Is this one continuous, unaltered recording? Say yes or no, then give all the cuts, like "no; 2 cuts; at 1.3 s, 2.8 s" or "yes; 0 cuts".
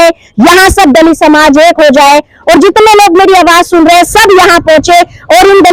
yes; 0 cuts